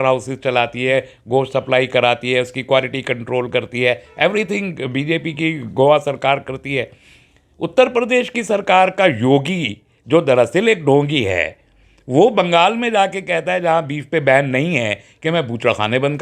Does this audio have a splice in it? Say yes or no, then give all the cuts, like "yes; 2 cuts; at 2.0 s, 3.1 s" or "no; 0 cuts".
no; 0 cuts